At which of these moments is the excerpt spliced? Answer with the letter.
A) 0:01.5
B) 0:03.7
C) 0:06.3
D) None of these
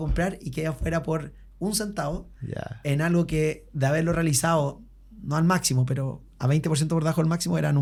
D